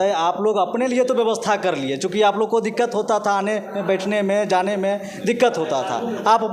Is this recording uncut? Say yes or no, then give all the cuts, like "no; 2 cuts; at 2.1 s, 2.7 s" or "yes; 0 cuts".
yes; 0 cuts